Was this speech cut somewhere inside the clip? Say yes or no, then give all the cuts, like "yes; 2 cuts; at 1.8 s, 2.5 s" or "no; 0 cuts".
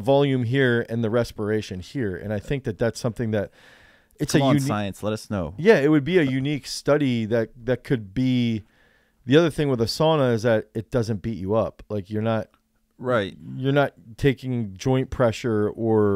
no; 0 cuts